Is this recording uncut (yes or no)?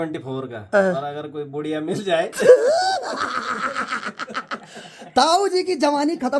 yes